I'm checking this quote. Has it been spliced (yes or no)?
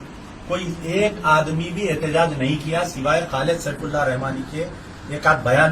no